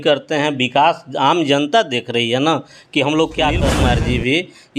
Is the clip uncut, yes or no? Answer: no